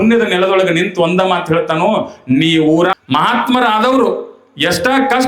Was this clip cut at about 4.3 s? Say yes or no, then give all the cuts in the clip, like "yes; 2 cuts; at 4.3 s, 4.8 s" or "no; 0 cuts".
no; 1 cut; at 3.0 s